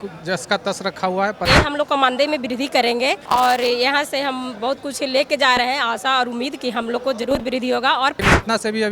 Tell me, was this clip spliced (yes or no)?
yes